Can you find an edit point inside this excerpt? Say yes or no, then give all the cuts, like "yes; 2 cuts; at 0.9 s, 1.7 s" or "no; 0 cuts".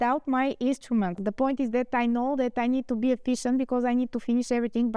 yes; 1 cut; at 1.2 s